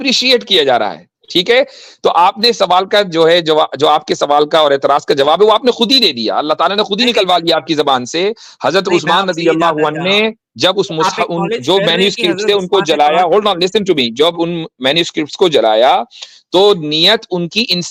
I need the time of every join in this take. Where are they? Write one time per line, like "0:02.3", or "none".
none